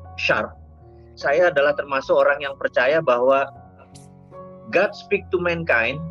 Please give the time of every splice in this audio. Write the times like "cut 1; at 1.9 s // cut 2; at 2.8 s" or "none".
cut 1; at 1.1 s